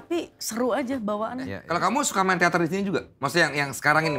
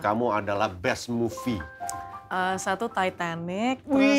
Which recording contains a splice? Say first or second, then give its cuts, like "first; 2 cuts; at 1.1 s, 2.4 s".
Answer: first; 1 cut; at 1.6 s